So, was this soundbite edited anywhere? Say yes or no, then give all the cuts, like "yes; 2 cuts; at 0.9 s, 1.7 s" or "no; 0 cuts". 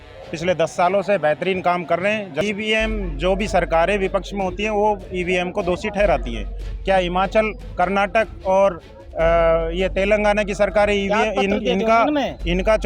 yes; 1 cut; at 2.4 s